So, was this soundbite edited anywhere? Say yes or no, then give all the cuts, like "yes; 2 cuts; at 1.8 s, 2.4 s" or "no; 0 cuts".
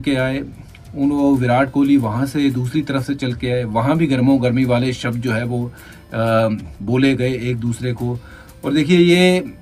no; 0 cuts